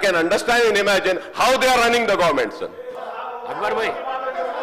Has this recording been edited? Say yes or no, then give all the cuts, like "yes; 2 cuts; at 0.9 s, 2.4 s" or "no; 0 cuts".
yes; 1 cut; at 2.9 s